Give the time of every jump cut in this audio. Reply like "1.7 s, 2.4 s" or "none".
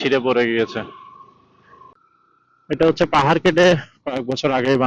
1.9 s